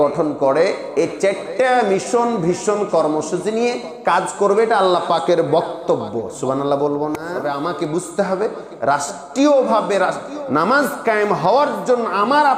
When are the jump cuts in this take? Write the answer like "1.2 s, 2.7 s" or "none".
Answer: 7.4 s